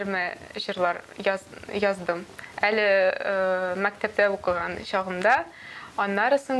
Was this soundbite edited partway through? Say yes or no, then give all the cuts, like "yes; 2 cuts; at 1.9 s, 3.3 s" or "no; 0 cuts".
no; 0 cuts